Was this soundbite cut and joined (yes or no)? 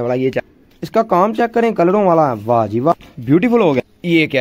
no